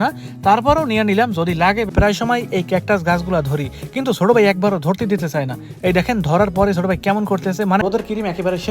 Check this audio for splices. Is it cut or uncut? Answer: cut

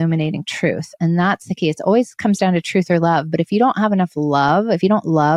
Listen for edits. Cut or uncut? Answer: uncut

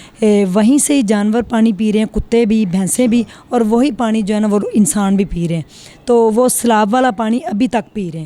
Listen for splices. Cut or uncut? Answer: uncut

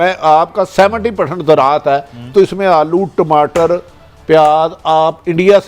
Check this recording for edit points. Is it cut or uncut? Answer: uncut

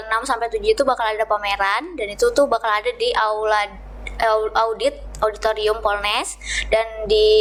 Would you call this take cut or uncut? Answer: uncut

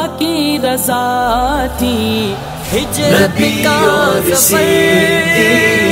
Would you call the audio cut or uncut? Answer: uncut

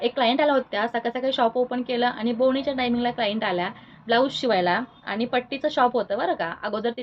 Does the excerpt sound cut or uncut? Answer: uncut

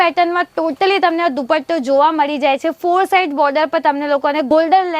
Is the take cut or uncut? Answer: uncut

